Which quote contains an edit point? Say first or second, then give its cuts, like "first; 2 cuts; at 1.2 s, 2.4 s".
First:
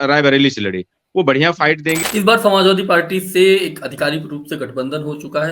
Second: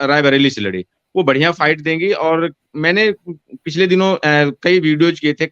first; 1 cut; at 2.0 s